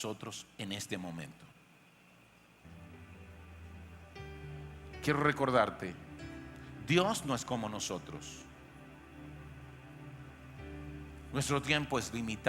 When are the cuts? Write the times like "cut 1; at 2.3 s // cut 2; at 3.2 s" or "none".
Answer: cut 1; at 2.6 s